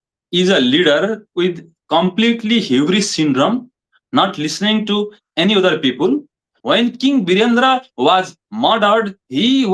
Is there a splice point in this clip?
yes; 1 cut; at 6.5 s

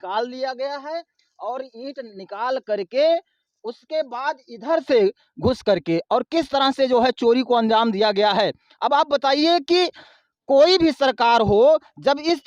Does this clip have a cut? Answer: no; 0 cuts

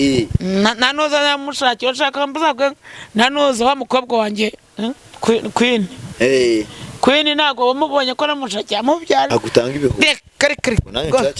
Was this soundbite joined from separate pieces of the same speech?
yes; 1 cut; at 9.3 s

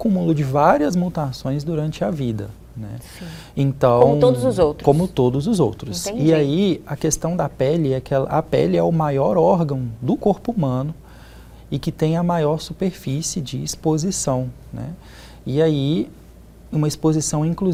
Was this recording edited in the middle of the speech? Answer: no; 0 cuts

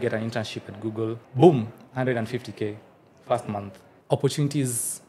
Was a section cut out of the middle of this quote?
yes; 2 cuts; at 1.2 s, 3.8 s

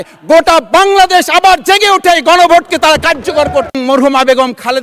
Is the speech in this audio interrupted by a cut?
yes; 1 cut; at 3.8 s

